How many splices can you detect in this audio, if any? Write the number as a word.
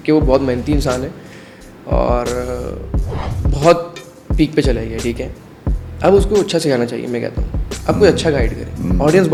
zero